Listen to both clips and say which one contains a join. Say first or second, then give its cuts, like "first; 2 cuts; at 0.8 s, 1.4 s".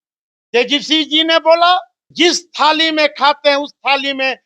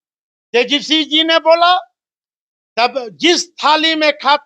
first; 1 cut; at 2.0 s